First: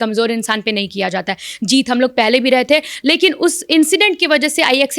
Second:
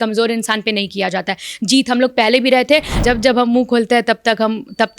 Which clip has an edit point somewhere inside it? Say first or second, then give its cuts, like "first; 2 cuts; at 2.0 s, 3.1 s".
second; 1 cut; at 3.0 s